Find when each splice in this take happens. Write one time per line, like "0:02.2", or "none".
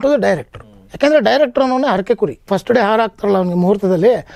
0:02.5